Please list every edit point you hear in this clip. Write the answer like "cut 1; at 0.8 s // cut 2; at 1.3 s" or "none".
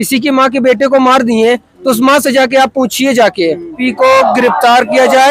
cut 1; at 3.8 s

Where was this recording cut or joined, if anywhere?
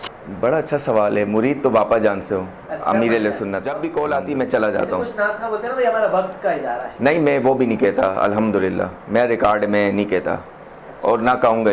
cut 1; at 3.7 s

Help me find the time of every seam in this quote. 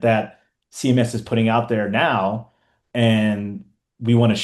none

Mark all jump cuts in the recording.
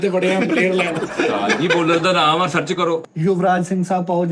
cut 1; at 3.0 s

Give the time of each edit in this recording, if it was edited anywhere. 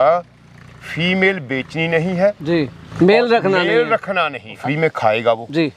cut 1; at 2.8 s // cut 2; at 4.6 s

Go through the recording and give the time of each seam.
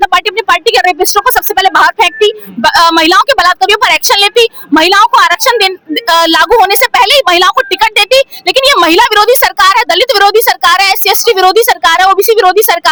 none

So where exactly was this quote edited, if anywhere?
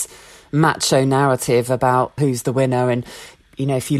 cut 1; at 2.1 s

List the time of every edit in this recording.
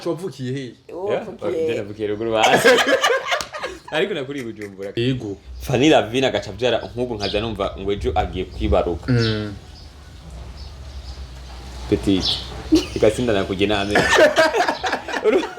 cut 1; at 4.9 s

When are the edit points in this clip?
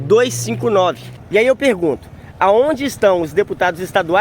cut 1; at 1.1 s

